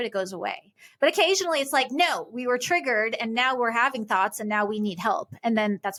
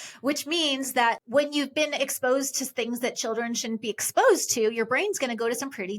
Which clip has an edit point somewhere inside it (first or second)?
second